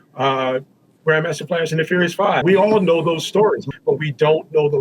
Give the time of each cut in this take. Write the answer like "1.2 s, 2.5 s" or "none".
2.4 s, 3.6 s

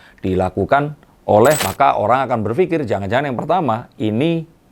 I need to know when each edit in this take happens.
1.6 s

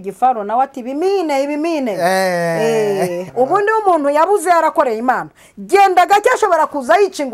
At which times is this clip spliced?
3.2 s

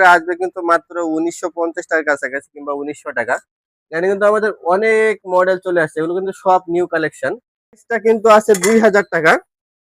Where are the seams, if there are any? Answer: 7.9 s

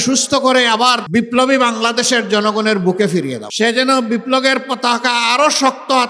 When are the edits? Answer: 1.0 s, 3.4 s

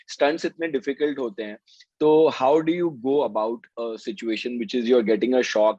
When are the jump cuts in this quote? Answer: none

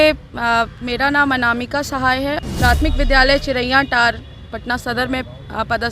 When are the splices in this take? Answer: 2.4 s

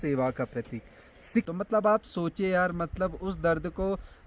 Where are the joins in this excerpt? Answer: 1.5 s

